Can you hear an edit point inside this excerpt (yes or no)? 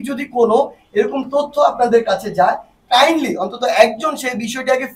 no